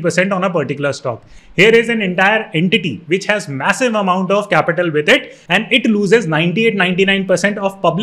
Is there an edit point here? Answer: no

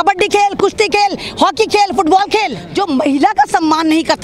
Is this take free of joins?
no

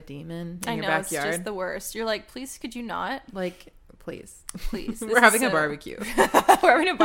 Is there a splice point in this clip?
no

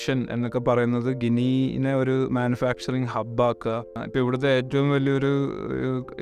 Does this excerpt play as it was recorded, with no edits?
no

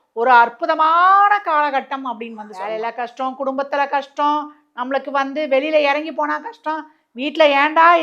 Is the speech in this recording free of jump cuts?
no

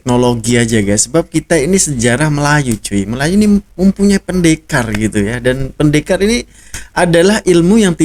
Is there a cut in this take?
no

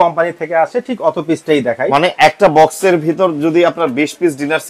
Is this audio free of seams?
yes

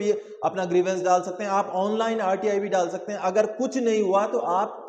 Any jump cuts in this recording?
no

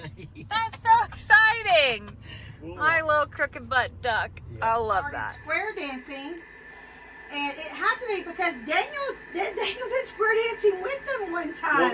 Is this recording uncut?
no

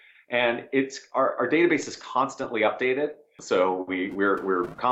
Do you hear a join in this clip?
yes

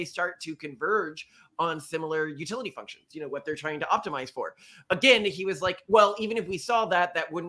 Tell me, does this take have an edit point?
no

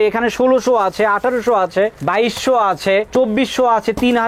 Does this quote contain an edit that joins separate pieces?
no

